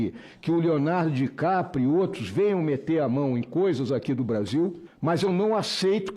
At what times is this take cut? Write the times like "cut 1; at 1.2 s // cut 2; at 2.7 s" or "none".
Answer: cut 1; at 4.9 s